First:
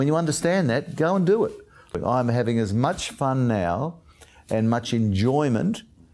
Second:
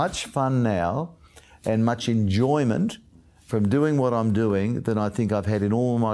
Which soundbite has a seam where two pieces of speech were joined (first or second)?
first